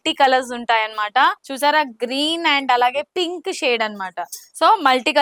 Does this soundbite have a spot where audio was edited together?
no; 0 cuts

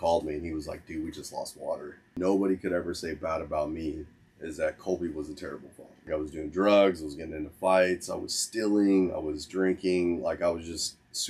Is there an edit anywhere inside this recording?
yes; 2 cuts; at 2.2 s, 6.1 s

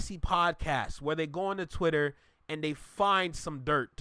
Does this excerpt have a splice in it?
no; 0 cuts

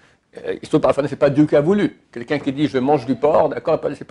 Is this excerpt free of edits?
yes; 0 cuts

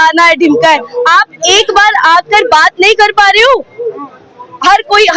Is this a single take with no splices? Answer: yes; 0 cuts

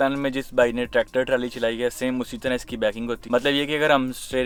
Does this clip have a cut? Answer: no; 0 cuts

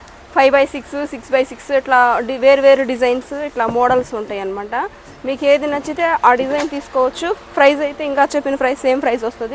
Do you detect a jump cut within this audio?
no; 0 cuts

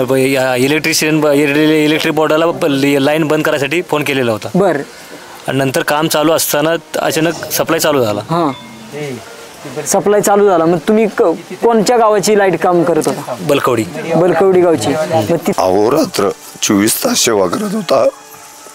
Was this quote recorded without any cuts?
no; 1 cut; at 15.5 s

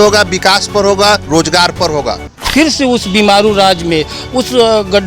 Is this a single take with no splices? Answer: no; 1 cut; at 2.3 s

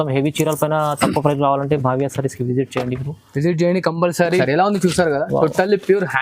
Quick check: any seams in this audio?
yes; 1 cut; at 4.4 s

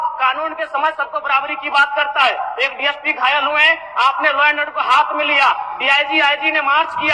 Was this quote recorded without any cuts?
yes; 0 cuts

